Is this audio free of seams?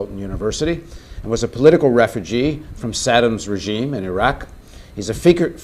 yes; 0 cuts

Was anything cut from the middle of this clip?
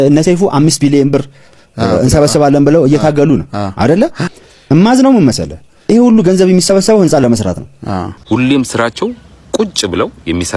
yes; 1 cut; at 8.1 s

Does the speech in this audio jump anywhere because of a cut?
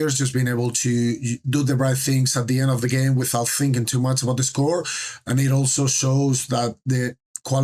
no; 0 cuts

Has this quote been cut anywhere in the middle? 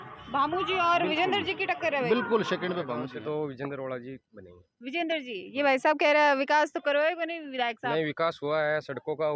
yes; 1 cut; at 3.1 s

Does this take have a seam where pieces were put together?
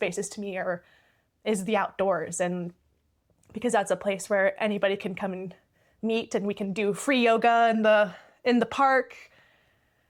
no; 0 cuts

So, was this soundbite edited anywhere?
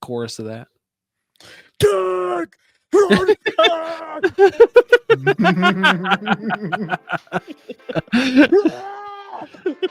no; 0 cuts

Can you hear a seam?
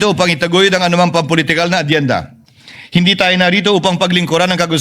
no; 0 cuts

